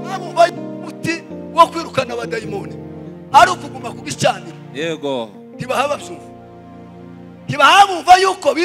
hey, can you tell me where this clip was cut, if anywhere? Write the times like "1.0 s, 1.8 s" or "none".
none